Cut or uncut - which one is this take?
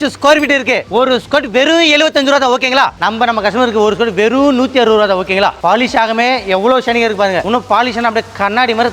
cut